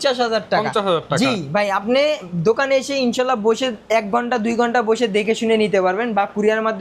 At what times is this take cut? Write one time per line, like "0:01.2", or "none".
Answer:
none